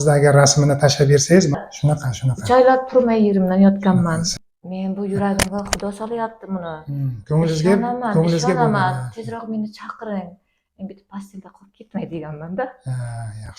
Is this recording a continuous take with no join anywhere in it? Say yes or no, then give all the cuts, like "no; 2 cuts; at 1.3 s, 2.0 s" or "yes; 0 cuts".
no; 2 cuts; at 1.6 s, 4.3 s